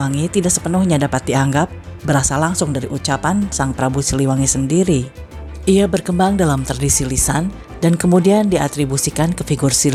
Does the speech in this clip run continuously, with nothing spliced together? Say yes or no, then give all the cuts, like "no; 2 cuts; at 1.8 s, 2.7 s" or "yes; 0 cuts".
yes; 0 cuts